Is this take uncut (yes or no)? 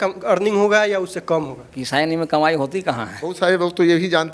no